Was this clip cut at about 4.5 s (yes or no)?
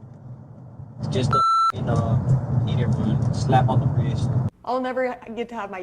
yes